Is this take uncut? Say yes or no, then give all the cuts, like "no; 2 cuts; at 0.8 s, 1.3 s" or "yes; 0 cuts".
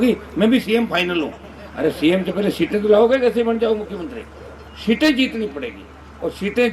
yes; 0 cuts